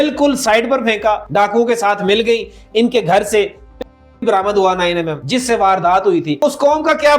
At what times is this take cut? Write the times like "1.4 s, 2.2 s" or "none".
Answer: 1.2 s, 5.2 s, 6.4 s

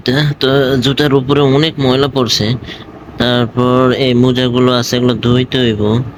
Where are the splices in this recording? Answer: none

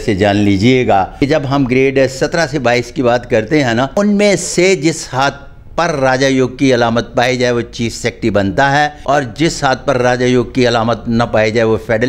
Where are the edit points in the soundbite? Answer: 1.1 s, 3.9 s, 9.0 s

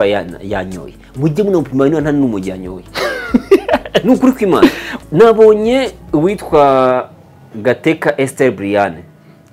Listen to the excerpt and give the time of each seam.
4.9 s

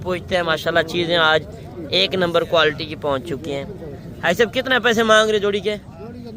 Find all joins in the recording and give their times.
none

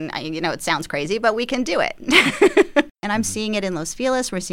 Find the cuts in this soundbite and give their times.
3.0 s

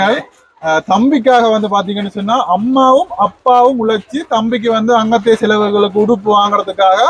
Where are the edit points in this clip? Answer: none

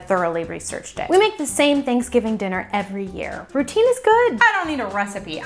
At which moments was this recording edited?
1.1 s, 4.4 s

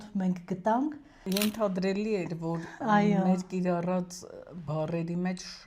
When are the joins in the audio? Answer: 1.2 s

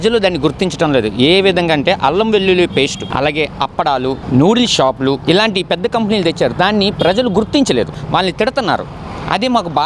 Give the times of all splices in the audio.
3.1 s, 4.2 s, 8.0 s

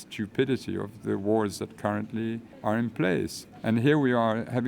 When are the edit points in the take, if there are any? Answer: 2.5 s, 3.4 s

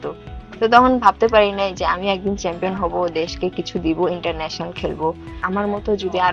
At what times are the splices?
5.4 s

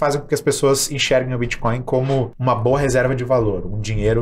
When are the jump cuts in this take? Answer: 2.3 s

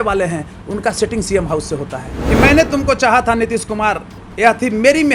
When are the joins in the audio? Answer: 2.1 s

